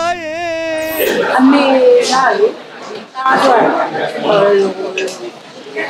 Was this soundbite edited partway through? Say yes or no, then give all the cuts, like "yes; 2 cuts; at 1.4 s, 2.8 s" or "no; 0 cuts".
yes; 1 cut; at 1.1 s